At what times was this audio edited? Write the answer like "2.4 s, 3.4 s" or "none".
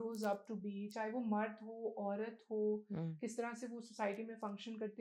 none